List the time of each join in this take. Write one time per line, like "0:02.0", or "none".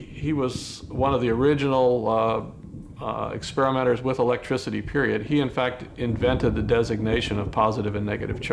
0:01.7